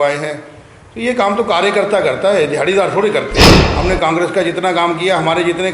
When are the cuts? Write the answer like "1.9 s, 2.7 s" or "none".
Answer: 3.6 s